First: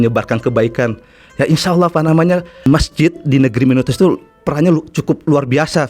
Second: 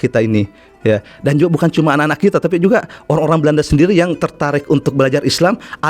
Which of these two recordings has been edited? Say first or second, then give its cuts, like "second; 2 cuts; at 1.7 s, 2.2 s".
first; 1 cut; at 2.5 s